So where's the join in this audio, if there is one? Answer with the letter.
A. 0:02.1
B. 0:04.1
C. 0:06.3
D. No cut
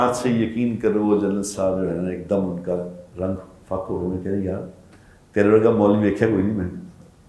D